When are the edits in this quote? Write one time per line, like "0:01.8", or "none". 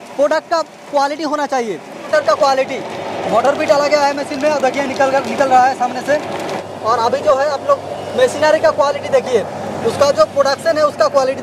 0:02.0
0:06.6